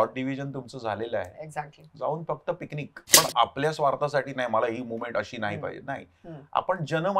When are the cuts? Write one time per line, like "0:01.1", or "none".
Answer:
0:03.1